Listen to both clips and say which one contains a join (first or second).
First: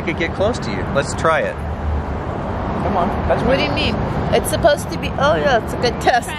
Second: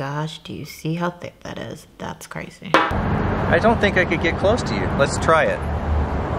second